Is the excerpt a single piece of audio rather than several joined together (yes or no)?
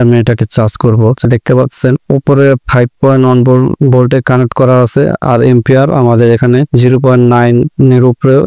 no